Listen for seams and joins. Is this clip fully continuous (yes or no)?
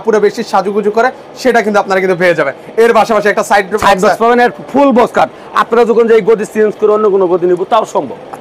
yes